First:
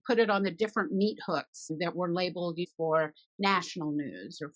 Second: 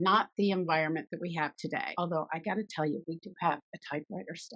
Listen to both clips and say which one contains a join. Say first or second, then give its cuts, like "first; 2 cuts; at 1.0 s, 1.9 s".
second; 1 cut; at 1.9 s